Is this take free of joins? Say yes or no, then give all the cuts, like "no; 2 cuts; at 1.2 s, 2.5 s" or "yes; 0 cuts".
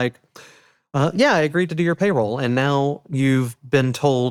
yes; 0 cuts